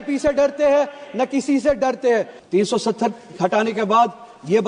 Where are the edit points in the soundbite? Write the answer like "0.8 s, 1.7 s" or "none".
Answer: 2.4 s